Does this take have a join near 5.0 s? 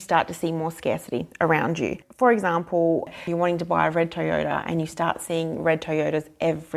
no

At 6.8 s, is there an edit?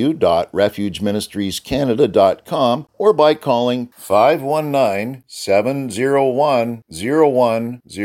no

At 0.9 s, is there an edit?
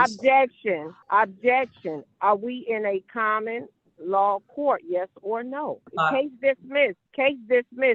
yes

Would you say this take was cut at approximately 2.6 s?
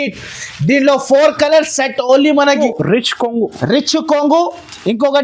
yes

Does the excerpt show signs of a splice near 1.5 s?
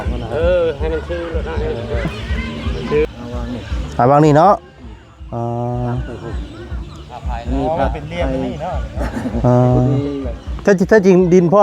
no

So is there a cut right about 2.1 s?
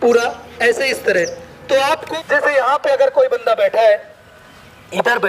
yes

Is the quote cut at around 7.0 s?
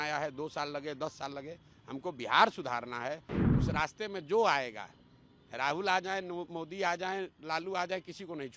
no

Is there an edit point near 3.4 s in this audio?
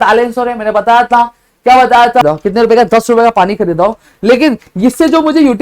no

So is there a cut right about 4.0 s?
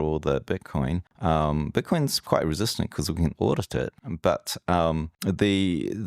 yes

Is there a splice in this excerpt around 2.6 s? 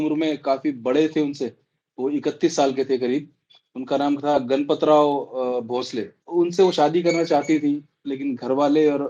no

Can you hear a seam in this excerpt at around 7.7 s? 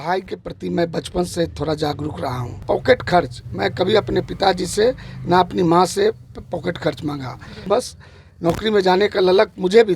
yes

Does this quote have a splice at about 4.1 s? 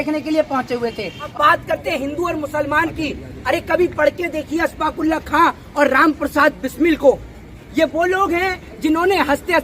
no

